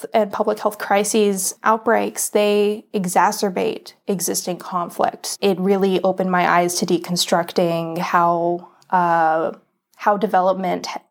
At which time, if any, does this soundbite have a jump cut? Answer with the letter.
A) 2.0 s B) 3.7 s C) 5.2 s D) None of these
C